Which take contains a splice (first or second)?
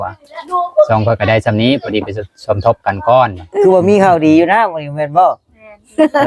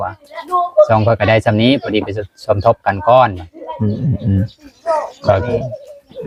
first